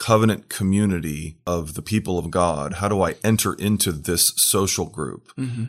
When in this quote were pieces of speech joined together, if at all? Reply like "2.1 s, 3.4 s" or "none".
1.3 s

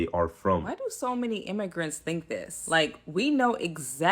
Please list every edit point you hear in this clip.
2.6 s

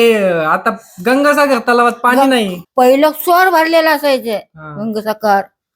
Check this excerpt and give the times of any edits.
2.6 s

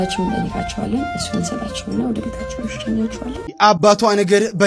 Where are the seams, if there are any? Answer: 3.5 s

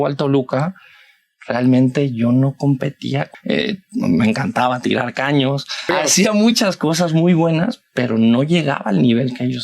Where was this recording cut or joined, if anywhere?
3.3 s, 5.9 s

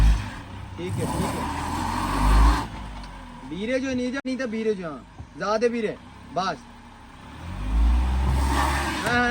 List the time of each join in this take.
4.2 s

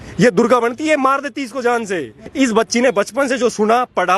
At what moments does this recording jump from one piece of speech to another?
2.2 s

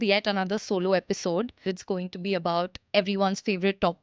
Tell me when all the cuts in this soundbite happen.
1.7 s, 2.8 s

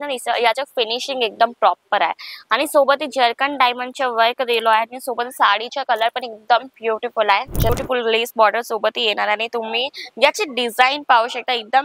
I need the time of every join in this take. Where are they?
7.7 s

